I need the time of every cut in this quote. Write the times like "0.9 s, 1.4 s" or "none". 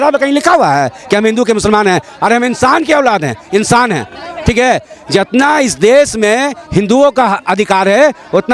none